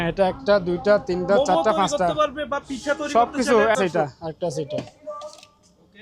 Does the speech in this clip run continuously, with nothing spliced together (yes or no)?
no